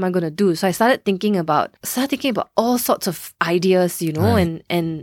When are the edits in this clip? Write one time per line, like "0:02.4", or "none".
0:01.8